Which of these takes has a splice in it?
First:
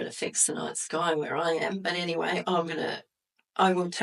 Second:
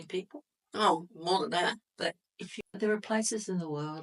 second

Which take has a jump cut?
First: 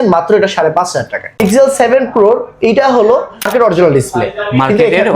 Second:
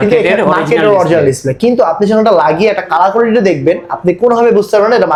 first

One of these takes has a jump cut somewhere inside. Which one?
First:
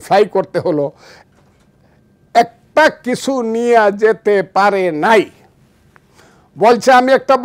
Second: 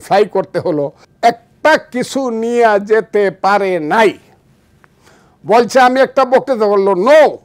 second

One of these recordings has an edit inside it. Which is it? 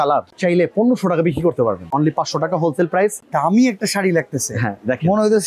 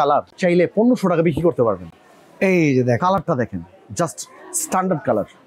first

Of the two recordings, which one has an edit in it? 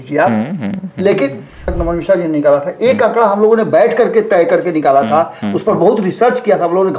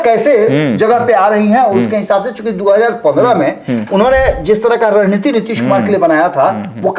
first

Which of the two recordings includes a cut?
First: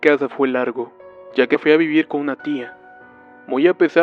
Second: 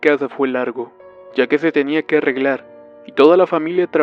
second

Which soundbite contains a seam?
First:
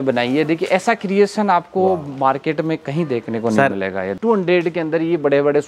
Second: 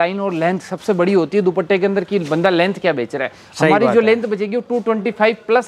first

